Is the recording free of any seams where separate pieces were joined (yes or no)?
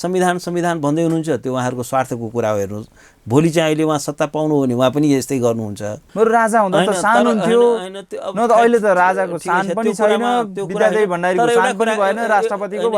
no